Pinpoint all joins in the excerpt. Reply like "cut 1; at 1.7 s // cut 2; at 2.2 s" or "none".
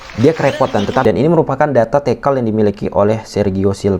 cut 1; at 1.0 s